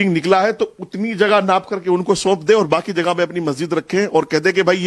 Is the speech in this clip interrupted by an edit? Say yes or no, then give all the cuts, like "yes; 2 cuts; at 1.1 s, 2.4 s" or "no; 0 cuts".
no; 0 cuts